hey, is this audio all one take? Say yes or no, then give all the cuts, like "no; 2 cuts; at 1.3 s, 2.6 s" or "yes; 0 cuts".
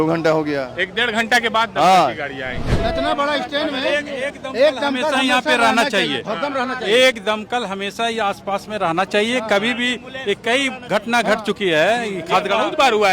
no; 1 cut; at 2.7 s